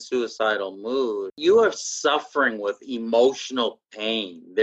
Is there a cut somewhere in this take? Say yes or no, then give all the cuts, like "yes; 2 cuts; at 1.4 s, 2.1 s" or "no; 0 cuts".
yes; 1 cut; at 1.4 s